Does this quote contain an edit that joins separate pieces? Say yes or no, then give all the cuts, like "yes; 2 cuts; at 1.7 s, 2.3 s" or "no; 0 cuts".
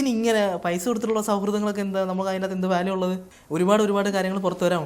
yes; 1 cut; at 3.3 s